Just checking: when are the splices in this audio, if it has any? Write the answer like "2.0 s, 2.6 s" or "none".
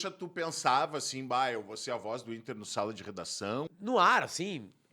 3.7 s